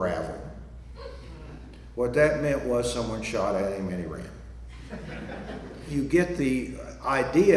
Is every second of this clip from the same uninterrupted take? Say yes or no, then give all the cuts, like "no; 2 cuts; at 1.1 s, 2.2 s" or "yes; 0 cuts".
no; 1 cut; at 5.8 s